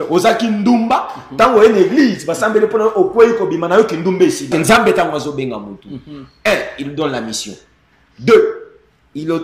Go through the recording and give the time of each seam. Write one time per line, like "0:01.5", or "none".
0:04.5